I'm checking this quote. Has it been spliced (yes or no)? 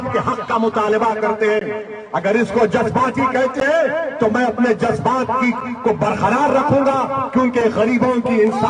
no